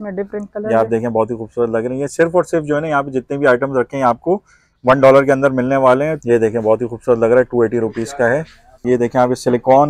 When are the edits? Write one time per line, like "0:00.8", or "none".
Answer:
0:06.2
0:08.7